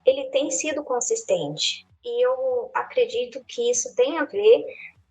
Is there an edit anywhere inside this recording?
no; 0 cuts

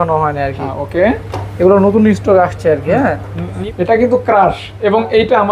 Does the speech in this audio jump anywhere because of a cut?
yes; 1 cut; at 3.5 s

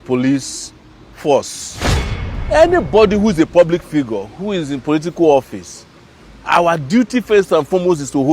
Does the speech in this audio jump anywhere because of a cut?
yes; 1 cut; at 2.1 s

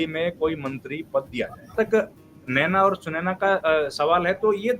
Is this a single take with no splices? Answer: no; 1 cut; at 1.7 s

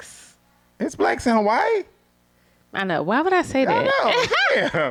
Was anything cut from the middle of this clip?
no; 0 cuts

